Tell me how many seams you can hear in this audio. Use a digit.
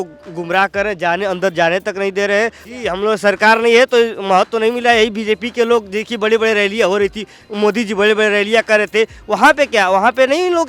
1